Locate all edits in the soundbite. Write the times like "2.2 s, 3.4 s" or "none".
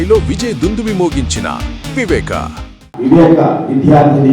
none